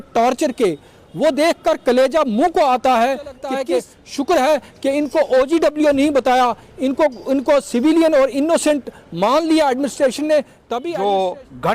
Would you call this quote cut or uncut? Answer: cut